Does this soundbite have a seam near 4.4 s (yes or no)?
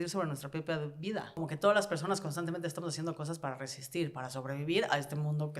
no